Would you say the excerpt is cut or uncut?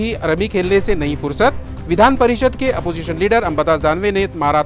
uncut